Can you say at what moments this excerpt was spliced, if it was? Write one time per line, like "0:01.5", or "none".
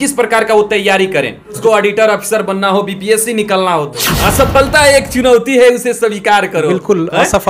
0:01.6
0:04.1